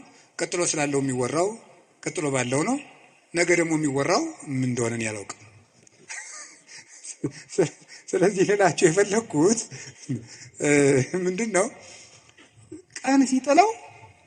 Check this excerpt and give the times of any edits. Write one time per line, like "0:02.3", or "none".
none